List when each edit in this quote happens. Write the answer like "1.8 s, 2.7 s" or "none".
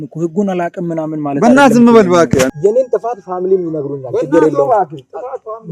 2.5 s